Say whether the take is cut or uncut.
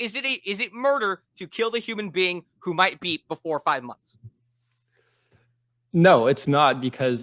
uncut